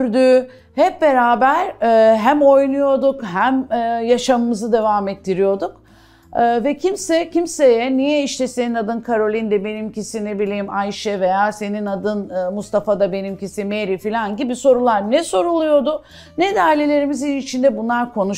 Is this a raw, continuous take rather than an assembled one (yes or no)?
yes